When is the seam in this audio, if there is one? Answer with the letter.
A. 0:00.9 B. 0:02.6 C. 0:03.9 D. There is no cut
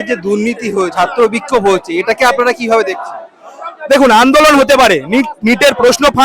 A